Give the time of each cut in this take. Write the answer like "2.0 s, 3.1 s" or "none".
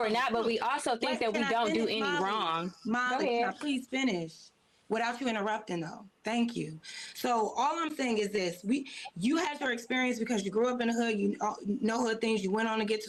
none